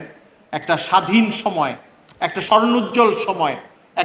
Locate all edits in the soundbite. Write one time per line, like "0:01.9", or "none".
0:02.4